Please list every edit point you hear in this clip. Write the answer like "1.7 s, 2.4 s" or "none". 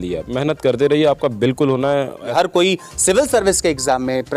2.2 s